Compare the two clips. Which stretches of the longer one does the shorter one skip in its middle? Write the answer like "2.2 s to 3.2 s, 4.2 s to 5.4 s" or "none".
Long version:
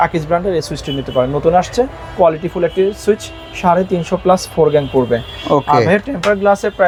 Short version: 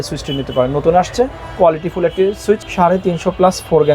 3.3 s to 3.5 s

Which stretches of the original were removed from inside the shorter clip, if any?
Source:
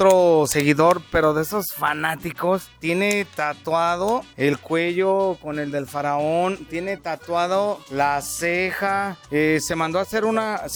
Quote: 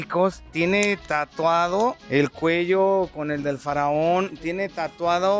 none

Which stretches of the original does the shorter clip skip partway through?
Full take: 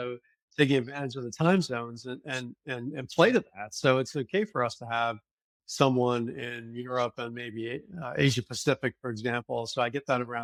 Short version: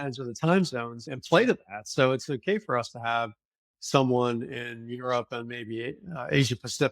2.0 s to 2.9 s

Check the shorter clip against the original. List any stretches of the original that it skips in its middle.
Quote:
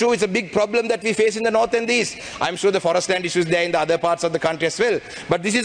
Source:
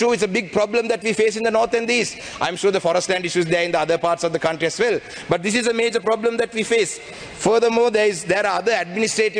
none

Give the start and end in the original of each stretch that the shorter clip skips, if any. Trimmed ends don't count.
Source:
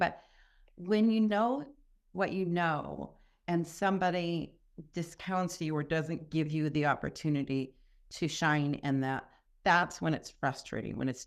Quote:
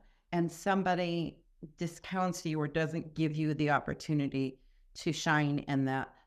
none

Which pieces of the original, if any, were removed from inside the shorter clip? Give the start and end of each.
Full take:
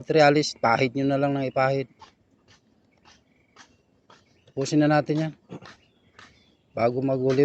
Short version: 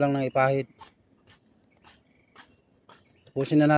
none

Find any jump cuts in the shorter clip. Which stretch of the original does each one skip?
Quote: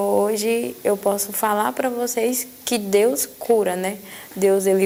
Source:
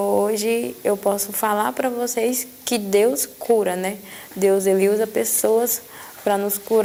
none

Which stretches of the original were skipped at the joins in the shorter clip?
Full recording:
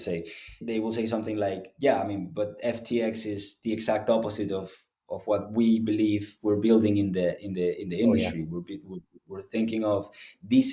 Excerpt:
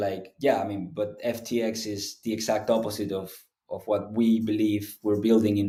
none

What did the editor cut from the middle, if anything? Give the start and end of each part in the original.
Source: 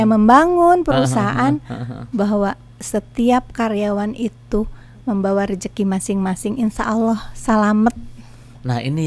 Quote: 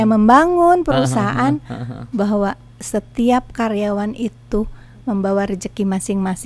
none

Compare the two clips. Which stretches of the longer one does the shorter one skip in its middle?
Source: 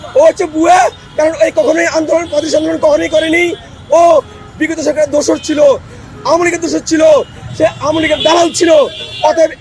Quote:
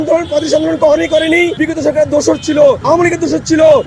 3.6 s to 4.6 s, 5.8 s to 6.2 s

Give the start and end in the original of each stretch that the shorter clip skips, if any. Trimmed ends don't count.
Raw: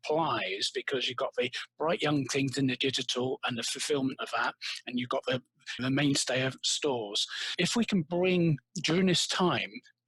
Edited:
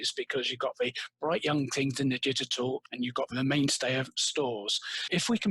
3.5 s to 5.4 s

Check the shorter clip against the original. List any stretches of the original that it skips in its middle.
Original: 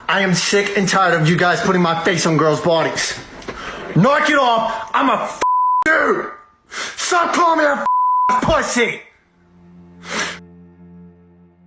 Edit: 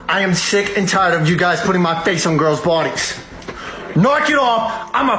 none

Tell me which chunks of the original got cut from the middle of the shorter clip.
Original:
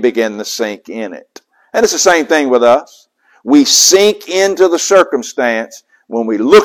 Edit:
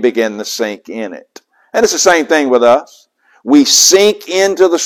none

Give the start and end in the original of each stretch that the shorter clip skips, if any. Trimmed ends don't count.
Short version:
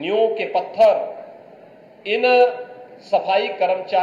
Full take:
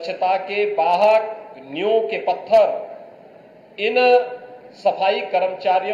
none

